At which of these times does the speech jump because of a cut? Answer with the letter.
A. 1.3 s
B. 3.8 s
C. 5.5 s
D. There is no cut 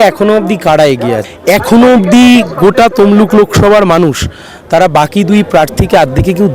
A